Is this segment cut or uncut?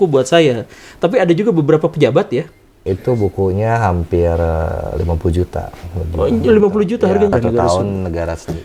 cut